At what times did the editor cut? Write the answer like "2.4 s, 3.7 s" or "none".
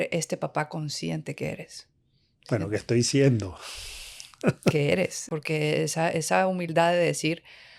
5.3 s